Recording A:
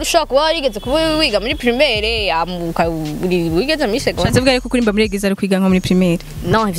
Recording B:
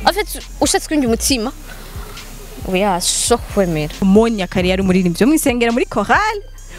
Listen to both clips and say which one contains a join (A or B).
B